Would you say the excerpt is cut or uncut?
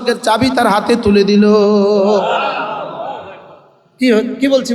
uncut